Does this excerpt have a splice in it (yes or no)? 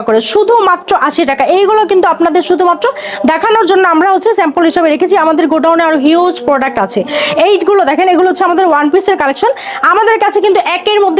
no